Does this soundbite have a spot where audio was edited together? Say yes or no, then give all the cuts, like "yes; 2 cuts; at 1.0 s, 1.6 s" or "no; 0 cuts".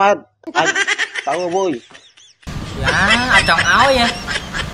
yes; 1 cut; at 2.5 s